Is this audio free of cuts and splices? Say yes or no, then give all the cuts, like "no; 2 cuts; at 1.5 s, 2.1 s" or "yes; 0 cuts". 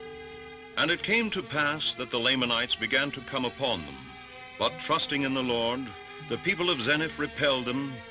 no; 1 cut; at 4.4 s